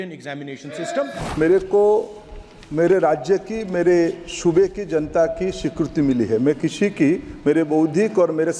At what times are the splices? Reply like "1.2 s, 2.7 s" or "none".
1.2 s